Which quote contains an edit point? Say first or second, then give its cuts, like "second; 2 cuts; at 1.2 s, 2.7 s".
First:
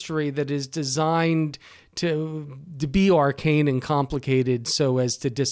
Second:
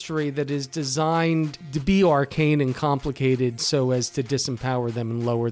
second; 1 cut; at 1.6 s